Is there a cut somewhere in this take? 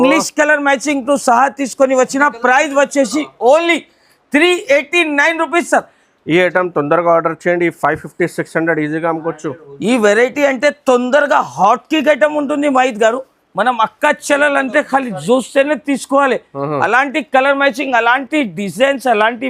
no; 0 cuts

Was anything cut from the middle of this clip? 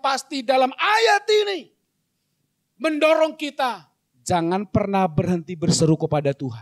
no; 0 cuts

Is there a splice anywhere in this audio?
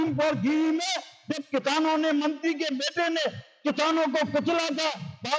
no; 0 cuts

